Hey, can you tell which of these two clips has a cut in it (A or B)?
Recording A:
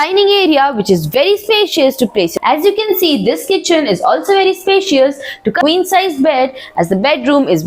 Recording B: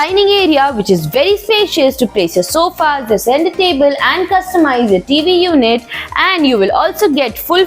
A